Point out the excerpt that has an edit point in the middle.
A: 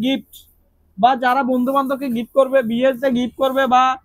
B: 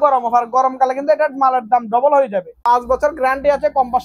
B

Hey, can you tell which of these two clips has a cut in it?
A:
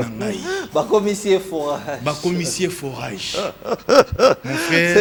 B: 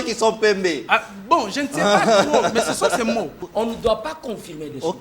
B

